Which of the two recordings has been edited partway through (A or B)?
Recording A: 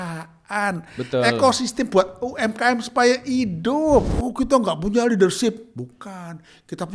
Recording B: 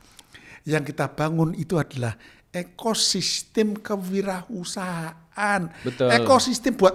A